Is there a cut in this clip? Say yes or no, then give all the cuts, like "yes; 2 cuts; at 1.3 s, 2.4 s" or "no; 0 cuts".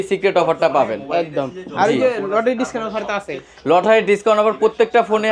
no; 0 cuts